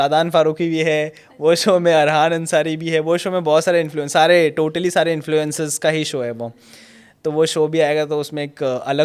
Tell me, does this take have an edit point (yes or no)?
no